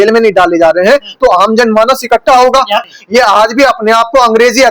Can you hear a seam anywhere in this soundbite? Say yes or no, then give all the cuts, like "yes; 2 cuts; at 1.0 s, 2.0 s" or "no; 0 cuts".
yes; 1 cut; at 2.8 s